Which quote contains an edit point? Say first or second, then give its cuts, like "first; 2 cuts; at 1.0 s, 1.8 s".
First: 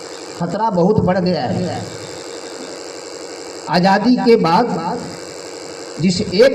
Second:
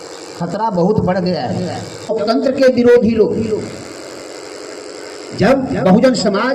second; 1 cut; at 2.1 s